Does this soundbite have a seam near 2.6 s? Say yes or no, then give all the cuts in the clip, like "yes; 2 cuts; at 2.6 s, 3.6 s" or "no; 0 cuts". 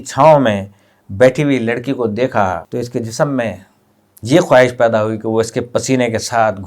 yes; 1 cut; at 2.6 s